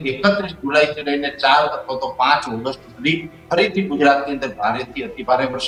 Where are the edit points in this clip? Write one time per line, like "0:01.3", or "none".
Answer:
none